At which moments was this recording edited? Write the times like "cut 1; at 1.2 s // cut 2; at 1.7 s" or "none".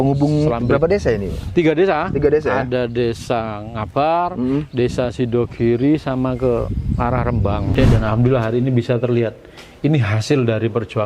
cut 1; at 7.7 s